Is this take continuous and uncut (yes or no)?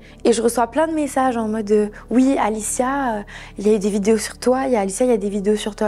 yes